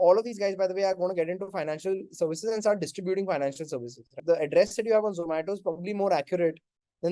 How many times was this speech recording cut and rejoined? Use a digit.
1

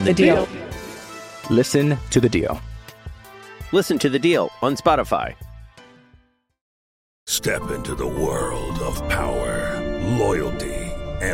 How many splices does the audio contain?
1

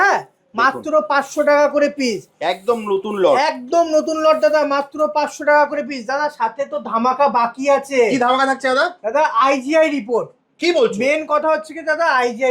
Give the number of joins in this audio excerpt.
0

